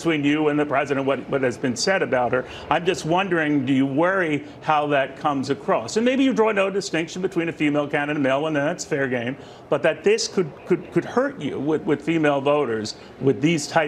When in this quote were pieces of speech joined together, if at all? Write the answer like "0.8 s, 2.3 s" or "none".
none